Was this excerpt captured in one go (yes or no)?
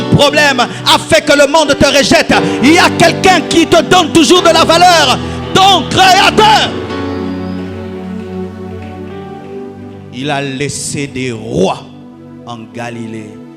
yes